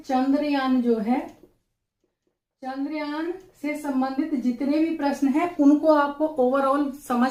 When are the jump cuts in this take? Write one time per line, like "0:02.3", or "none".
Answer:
none